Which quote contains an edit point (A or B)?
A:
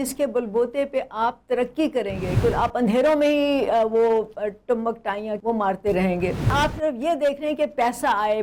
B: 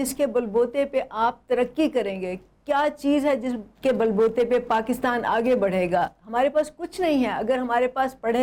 A